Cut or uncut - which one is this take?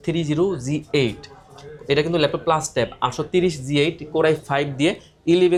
uncut